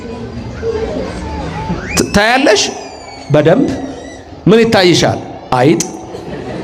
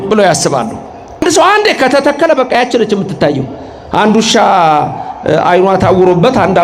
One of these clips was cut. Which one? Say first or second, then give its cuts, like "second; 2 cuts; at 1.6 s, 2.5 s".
second; 1 cut; at 1.2 s